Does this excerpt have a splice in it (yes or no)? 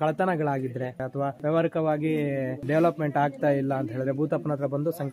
yes